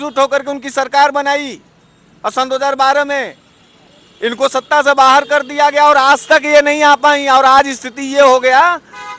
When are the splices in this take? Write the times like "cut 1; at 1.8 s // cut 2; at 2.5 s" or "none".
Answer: none